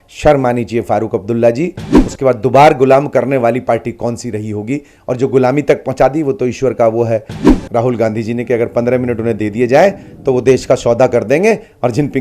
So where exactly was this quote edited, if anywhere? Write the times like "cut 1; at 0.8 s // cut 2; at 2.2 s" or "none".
cut 1; at 2.0 s // cut 2; at 7.6 s